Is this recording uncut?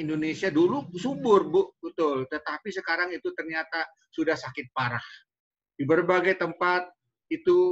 yes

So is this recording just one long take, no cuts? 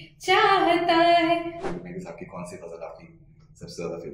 no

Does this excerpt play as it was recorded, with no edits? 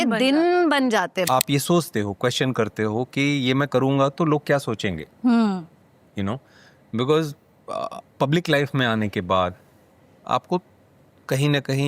no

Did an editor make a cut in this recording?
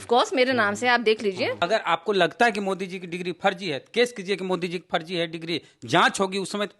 yes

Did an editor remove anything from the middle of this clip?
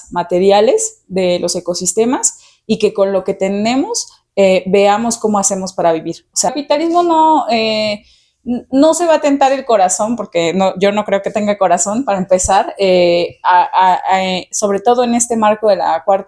yes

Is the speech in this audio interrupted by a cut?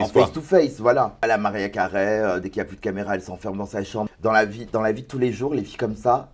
yes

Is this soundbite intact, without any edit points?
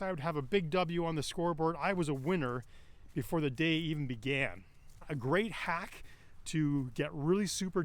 no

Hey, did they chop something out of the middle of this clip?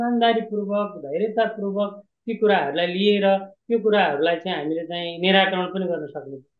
no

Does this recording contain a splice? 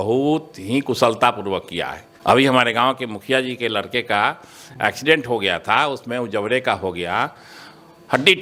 no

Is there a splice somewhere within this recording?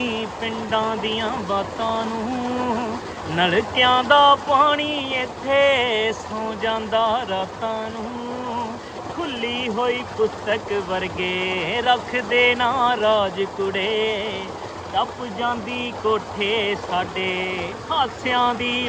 no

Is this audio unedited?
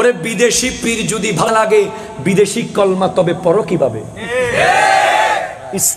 no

